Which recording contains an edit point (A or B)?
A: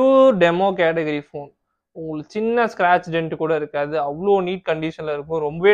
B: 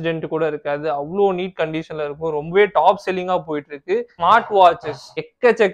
B